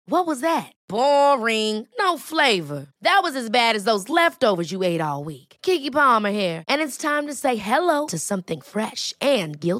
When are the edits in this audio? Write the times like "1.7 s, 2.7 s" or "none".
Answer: none